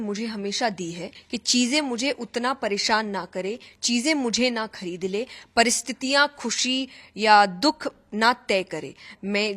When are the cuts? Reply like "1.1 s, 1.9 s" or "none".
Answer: 1.1 s